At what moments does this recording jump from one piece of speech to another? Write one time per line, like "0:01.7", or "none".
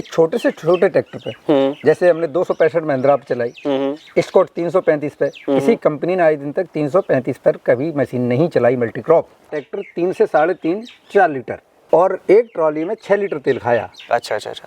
0:09.5
0:11.7